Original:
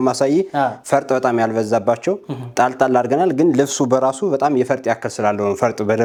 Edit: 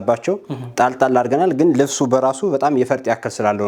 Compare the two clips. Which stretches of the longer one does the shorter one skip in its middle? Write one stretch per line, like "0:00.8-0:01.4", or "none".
none